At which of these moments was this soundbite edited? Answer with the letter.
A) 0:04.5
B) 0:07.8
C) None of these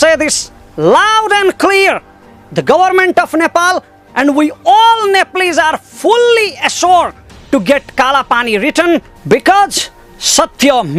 C